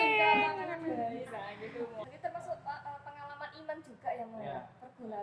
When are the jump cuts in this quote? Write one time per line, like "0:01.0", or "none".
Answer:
0:02.0